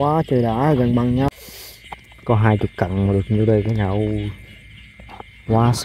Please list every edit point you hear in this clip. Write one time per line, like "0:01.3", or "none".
0:01.3